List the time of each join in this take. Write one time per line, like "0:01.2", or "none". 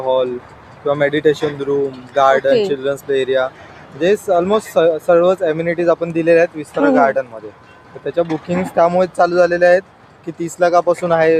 none

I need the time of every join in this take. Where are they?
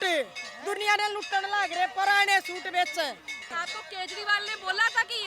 0:03.6

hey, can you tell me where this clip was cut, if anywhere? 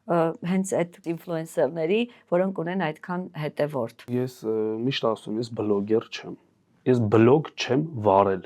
0:01.0
0:04.1

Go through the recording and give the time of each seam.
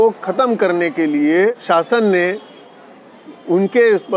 0:01.6

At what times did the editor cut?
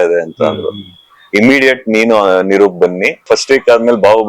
0:03.2

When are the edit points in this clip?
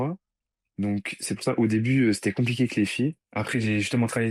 0:03.2

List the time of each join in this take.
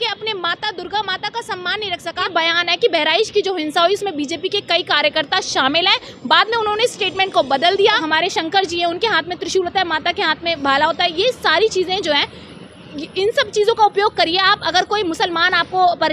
0:02.3
0:08.0

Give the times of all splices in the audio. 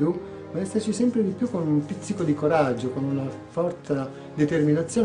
none

